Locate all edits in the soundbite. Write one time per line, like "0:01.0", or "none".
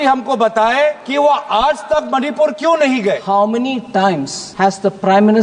0:01.0
0:03.2
0:04.4